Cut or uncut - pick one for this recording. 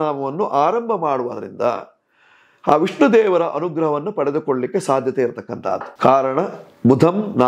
uncut